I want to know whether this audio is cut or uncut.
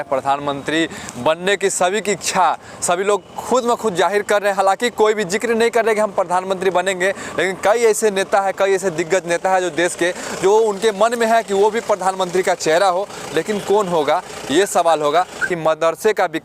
cut